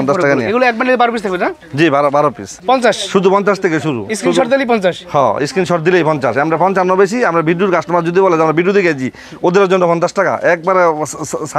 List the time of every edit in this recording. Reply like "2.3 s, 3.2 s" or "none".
2.5 s